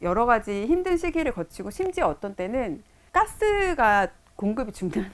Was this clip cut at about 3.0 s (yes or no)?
yes